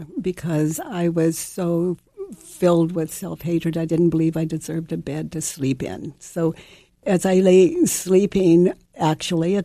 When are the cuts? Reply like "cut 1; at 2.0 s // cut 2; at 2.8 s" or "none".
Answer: cut 1; at 7.0 s